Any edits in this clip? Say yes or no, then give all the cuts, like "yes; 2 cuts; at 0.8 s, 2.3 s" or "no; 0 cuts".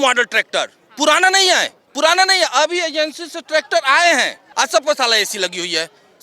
yes; 1 cut; at 4.4 s